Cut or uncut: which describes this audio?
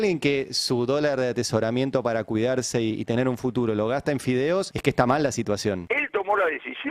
cut